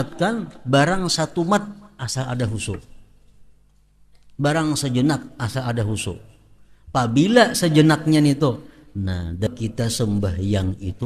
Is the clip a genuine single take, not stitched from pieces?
no; 1 cut; at 9.5 s

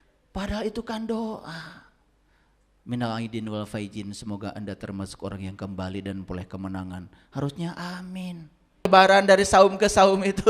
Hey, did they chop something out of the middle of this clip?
yes; 1 cut; at 8.9 s

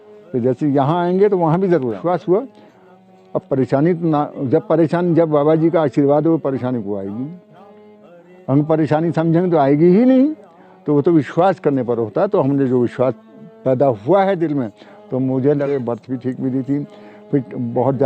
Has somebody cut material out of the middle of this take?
yes; 2 cuts; at 2.0 s, 15.7 s

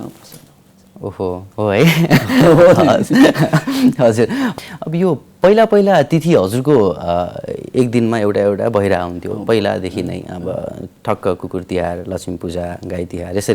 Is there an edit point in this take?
yes; 1 cut; at 4.5 s

